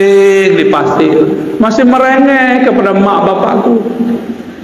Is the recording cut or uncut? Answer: uncut